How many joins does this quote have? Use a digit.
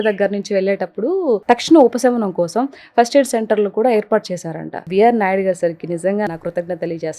3